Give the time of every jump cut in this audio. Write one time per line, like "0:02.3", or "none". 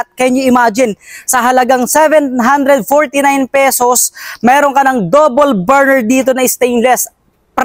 none